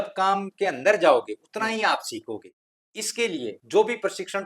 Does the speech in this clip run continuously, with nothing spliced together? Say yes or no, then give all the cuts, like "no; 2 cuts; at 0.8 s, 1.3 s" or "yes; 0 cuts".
no; 1 cut; at 2.5 s